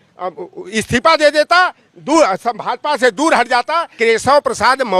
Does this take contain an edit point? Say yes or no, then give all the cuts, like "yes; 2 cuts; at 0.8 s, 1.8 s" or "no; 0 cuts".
yes; 1 cut; at 3.9 s